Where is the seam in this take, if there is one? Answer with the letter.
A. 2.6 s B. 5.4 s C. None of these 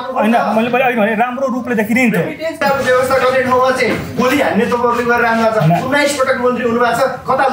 A